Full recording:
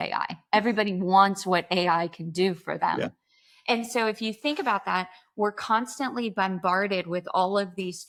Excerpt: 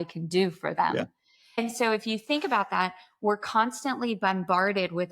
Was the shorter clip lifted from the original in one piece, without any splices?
no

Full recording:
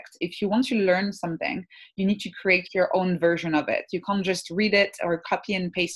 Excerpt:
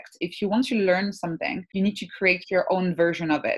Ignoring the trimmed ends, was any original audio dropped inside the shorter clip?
yes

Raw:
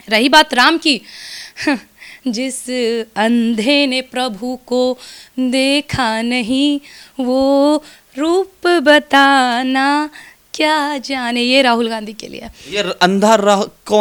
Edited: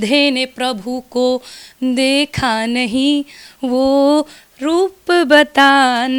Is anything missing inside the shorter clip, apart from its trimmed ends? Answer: no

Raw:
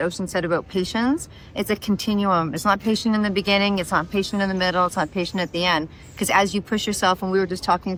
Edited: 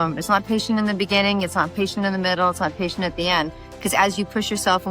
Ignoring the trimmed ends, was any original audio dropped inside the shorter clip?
no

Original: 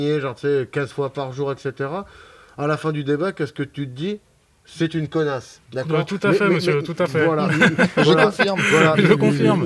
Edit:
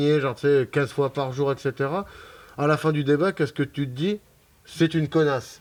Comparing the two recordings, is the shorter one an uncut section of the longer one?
yes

